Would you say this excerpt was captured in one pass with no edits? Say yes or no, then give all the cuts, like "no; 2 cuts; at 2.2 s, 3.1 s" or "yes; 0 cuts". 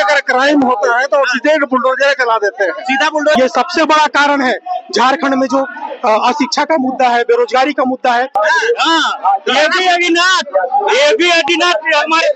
no; 2 cuts; at 3.4 s, 8.3 s